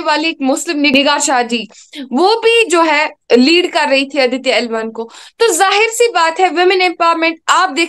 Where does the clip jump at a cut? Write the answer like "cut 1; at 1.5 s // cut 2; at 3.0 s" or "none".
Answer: cut 1; at 0.9 s

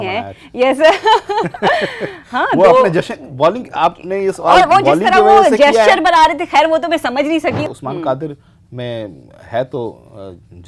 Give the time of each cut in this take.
cut 1; at 7.6 s

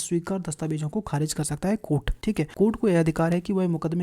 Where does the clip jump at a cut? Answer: cut 1; at 2.3 s

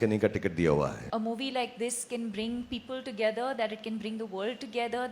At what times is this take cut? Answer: cut 1; at 1.0 s

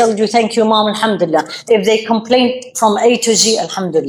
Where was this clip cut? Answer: none

